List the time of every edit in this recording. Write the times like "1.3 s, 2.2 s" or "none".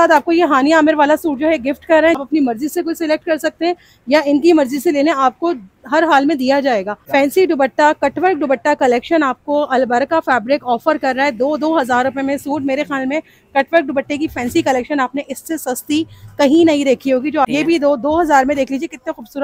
2.2 s, 7.0 s, 17.5 s